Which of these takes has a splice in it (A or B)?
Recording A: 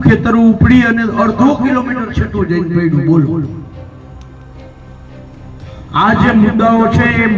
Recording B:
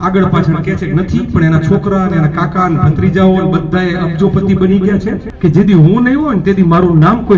B